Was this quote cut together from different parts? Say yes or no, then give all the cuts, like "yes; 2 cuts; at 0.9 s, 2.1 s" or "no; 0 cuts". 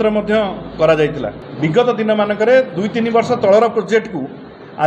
yes; 1 cut; at 1.4 s